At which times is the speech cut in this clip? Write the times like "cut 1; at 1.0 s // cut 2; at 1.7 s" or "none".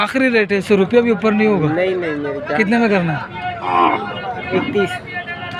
none

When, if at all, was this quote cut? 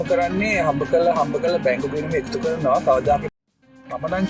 cut 1; at 3.3 s

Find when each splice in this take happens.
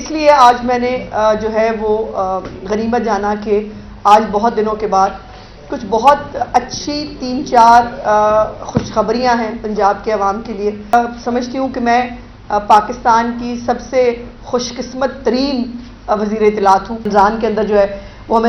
cut 1; at 10.9 s // cut 2; at 17.1 s

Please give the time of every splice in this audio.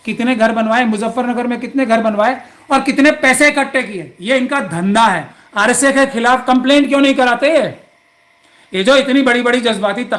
none

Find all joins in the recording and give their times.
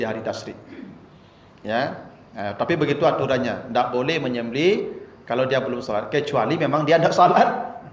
none

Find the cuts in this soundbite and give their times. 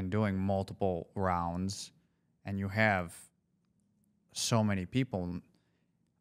none

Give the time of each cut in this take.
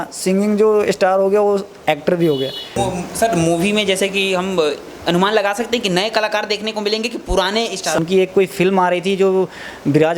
cut 1; at 2.7 s // cut 2; at 8.0 s

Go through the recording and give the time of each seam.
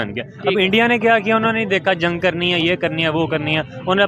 none

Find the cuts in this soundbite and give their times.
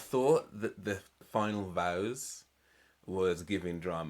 cut 1; at 1.1 s

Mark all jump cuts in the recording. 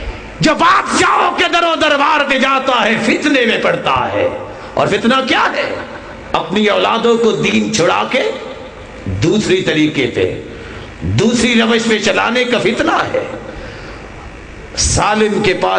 none

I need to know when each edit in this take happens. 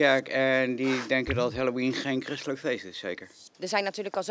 cut 1; at 3.3 s

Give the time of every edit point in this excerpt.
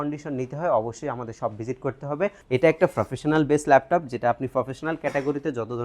cut 1; at 2.4 s

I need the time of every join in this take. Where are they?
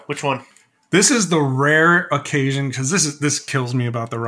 none

